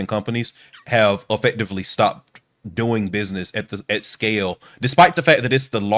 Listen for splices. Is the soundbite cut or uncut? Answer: uncut